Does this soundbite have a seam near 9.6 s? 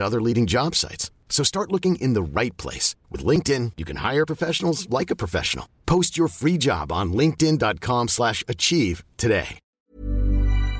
yes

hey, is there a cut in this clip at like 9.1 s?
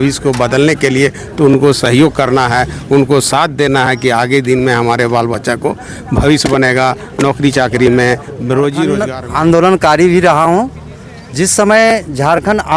yes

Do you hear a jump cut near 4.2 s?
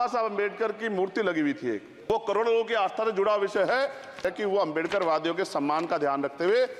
yes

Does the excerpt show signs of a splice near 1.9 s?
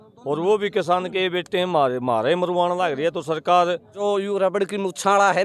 no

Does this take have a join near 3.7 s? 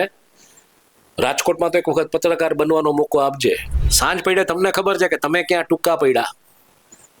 yes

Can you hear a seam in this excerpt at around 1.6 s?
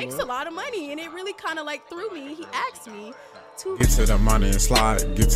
no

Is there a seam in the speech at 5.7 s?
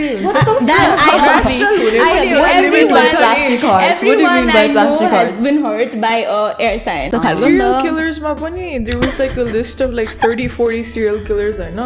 no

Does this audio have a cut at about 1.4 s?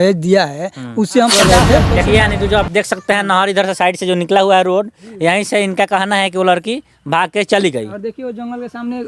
yes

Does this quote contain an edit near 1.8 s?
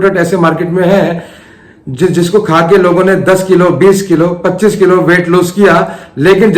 no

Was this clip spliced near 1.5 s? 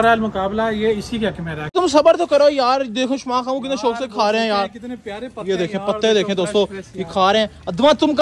yes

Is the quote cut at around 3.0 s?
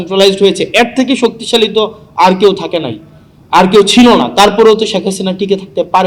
no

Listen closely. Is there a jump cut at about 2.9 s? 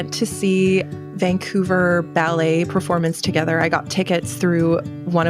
no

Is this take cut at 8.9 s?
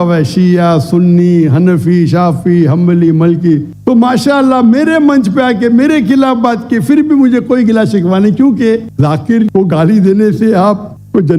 yes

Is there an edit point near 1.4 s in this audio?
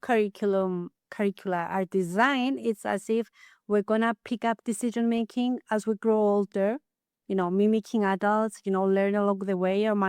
no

